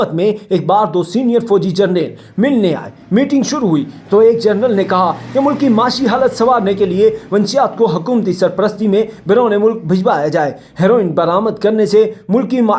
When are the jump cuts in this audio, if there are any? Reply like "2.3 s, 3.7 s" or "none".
none